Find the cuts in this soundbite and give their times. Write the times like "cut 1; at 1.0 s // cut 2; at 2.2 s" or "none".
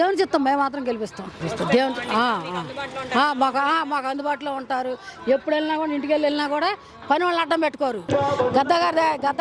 cut 1; at 1.4 s // cut 2; at 8.1 s